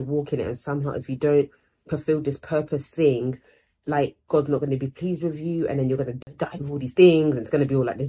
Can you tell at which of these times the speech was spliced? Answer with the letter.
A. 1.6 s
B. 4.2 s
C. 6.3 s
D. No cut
C